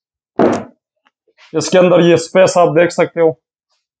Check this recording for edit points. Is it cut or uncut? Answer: uncut